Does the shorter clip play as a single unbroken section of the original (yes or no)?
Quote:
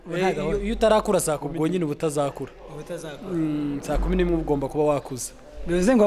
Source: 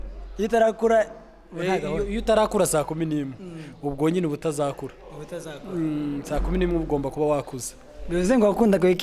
no